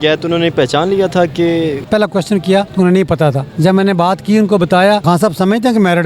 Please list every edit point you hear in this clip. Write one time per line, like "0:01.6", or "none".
0:01.8
0:02.7
0:03.5
0:05.0